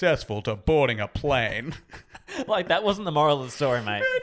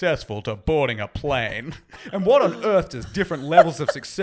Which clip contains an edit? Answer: second; 1 cut; at 2.1 s

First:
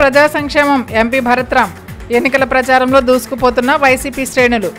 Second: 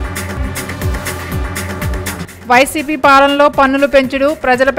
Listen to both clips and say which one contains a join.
second; 1 cut; at 2.2 s

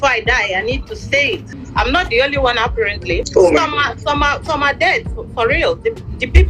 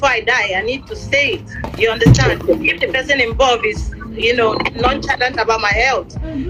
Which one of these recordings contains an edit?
first; 2 cuts; at 1.5 s, 3.3 s

